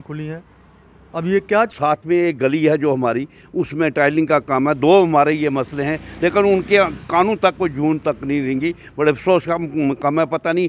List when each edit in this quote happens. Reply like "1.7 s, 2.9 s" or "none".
1.7 s